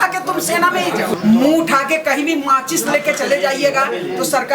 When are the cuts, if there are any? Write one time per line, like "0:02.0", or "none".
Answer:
0:01.2